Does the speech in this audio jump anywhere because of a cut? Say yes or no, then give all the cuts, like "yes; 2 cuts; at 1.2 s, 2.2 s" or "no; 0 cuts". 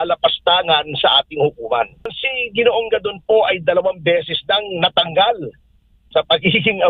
yes; 1 cut; at 2.2 s